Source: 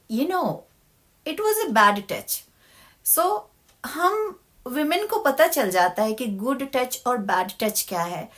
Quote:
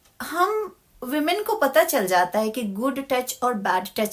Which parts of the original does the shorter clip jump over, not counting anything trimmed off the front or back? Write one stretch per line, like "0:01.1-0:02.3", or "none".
none